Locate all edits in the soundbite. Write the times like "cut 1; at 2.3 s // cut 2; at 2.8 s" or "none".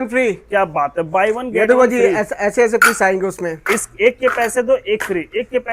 none

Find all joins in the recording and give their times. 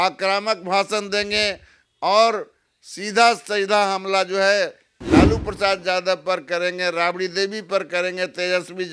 none

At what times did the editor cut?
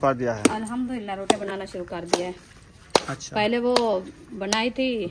none

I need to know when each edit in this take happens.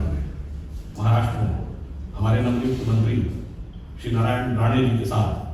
cut 1; at 0.9 s

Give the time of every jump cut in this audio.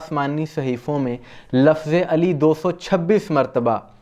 none

